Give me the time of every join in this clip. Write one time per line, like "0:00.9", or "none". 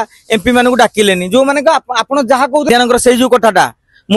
0:02.7